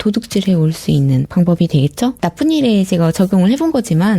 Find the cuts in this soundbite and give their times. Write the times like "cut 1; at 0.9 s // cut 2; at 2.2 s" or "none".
cut 1; at 1.3 s